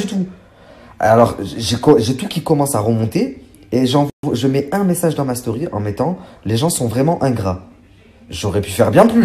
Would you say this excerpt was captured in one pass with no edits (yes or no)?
yes